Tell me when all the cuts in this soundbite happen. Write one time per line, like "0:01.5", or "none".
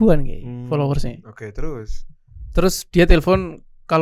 none